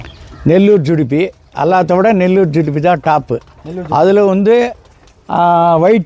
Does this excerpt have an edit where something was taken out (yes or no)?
no